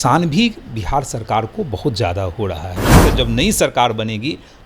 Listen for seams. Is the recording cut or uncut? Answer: cut